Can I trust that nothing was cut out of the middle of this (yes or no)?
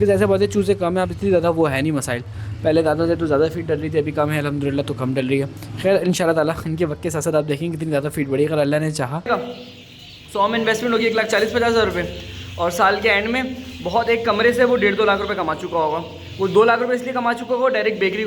no